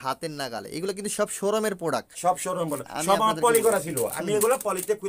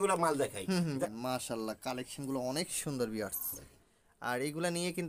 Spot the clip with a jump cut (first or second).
second